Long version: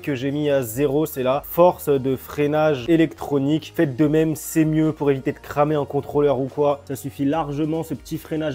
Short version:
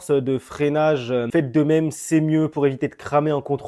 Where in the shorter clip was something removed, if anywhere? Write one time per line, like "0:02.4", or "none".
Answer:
0:01.1